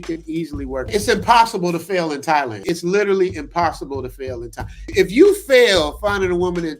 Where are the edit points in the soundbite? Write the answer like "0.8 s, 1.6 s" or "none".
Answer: 0.9 s, 2.6 s, 4.9 s